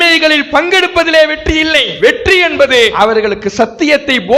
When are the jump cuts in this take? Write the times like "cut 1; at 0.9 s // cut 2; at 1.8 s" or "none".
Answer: cut 1; at 1.9 s // cut 2; at 2.9 s